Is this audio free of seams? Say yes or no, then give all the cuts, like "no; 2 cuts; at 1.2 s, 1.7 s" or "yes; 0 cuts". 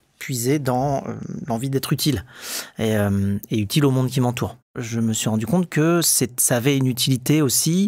no; 1 cut; at 4.8 s